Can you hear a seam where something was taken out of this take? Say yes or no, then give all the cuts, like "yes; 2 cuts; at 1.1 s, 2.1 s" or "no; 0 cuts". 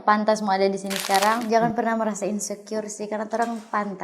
yes; 1 cut; at 1.4 s